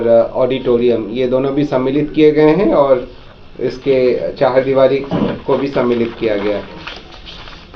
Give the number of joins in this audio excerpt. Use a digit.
0